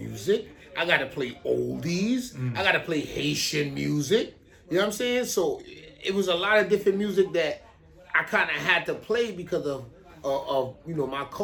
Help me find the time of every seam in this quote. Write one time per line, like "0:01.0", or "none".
none